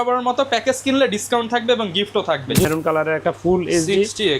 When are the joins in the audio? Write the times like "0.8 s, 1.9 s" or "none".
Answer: 2.7 s